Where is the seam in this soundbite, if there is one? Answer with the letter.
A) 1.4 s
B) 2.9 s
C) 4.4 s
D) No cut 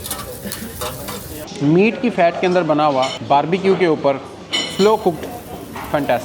A